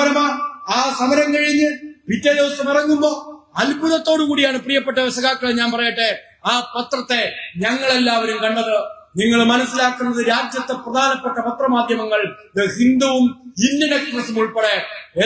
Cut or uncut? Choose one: uncut